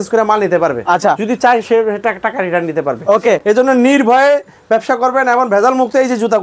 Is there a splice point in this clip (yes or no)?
no